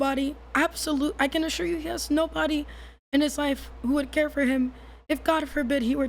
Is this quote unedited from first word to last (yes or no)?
yes